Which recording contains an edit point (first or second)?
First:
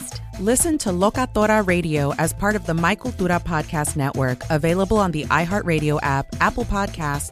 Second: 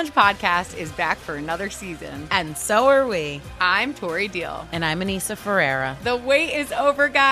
second